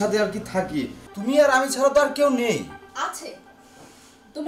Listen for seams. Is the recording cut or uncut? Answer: cut